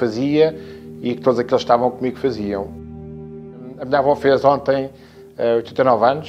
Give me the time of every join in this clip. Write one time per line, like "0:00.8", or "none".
0:03.1